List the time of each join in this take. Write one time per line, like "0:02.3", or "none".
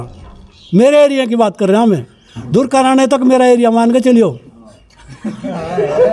none